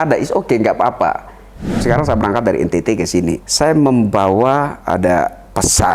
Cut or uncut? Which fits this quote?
cut